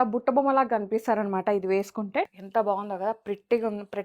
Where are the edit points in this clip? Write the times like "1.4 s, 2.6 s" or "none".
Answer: 2.3 s